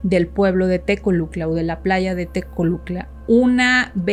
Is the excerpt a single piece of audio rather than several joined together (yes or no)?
yes